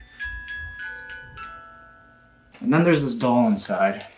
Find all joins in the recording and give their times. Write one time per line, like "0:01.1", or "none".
0:02.4